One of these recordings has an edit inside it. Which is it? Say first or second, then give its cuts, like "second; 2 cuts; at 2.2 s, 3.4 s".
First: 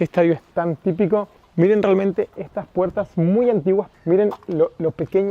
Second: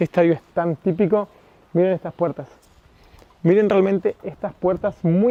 first; 2 cuts; at 1.4 s, 3.9 s